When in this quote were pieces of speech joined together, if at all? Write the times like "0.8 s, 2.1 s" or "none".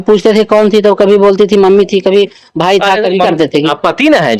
3.3 s